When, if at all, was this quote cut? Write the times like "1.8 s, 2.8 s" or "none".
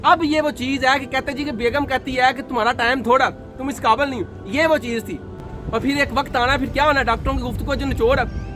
5.4 s